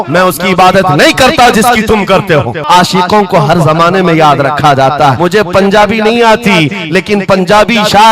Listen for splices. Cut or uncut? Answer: cut